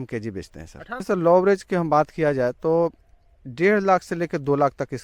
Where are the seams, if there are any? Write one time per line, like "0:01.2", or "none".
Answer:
0:01.0